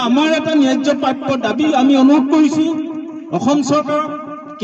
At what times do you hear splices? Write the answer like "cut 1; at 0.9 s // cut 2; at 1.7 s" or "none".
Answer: none

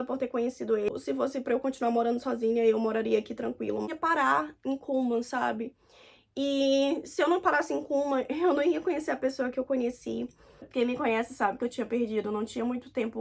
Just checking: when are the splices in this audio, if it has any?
cut 1; at 0.9 s // cut 2; at 3.9 s // cut 3; at 10.7 s

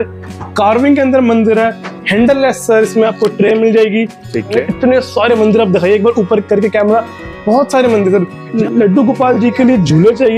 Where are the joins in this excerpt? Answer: cut 1; at 4.6 s // cut 2; at 8.4 s

